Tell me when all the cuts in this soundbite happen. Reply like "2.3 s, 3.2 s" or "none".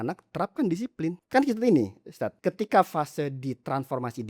1.2 s, 2.4 s